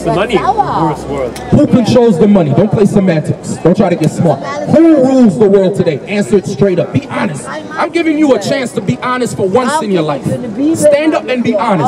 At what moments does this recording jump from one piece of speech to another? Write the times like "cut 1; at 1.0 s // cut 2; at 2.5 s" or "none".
cut 1; at 7.6 s